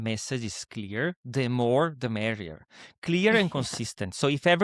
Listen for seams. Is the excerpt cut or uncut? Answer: uncut